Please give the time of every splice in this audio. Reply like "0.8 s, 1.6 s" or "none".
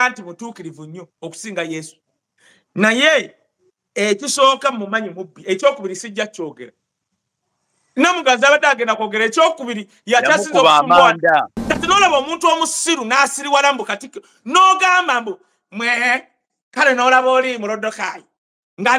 11.6 s